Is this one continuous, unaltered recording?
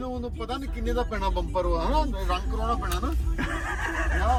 yes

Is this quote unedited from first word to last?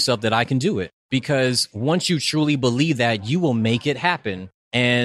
no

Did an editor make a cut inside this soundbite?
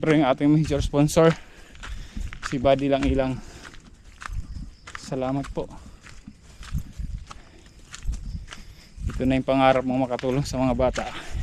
no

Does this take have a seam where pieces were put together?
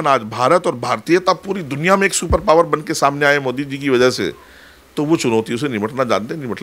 no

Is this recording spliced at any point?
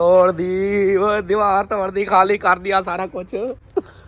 no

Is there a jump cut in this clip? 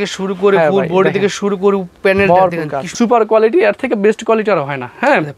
yes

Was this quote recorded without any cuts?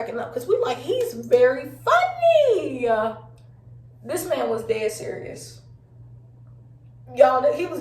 no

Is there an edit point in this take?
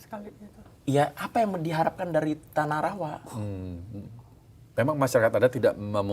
no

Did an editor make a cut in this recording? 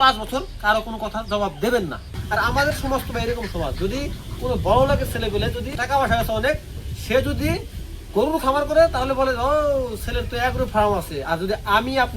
yes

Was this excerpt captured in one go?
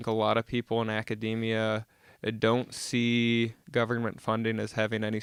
yes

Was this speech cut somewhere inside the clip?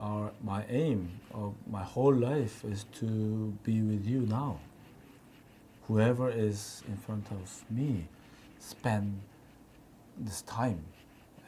no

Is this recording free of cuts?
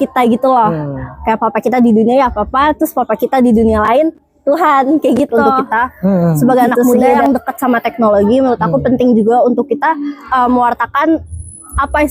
no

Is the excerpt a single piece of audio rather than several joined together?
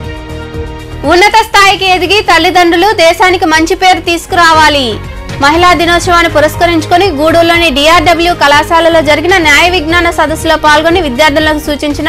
no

